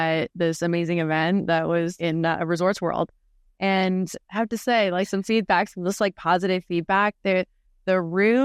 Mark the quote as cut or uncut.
uncut